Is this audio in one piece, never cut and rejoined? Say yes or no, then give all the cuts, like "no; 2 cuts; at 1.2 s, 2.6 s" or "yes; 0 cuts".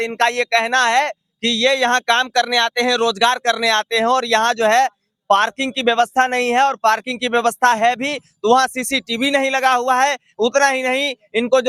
yes; 0 cuts